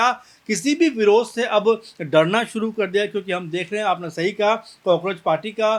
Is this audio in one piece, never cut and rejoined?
yes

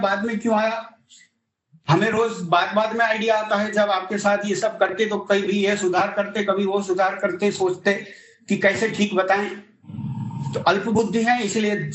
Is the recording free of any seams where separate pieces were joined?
yes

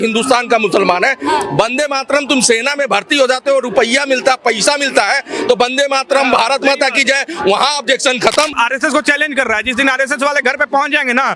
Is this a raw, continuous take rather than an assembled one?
no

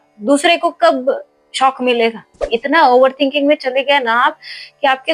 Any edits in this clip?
yes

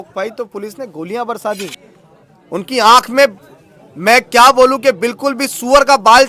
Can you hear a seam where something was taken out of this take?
yes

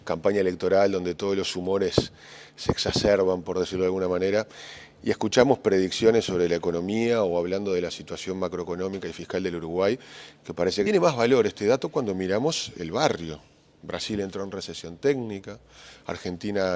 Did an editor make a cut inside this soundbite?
no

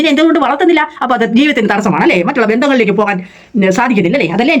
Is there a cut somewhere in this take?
no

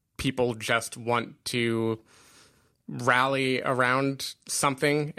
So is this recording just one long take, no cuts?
yes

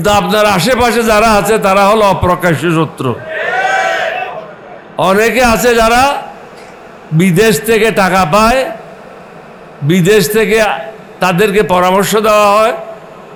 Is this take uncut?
yes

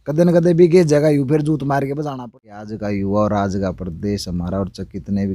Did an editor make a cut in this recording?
yes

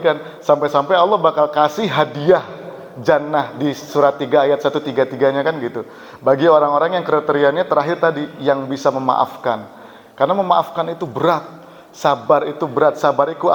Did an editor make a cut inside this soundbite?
no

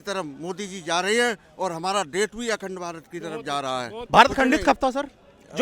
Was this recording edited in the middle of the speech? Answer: yes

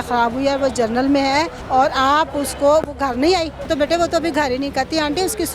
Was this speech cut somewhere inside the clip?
yes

